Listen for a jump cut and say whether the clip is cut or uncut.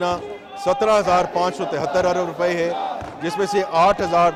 uncut